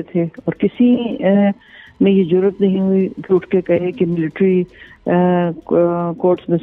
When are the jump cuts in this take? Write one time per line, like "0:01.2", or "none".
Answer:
none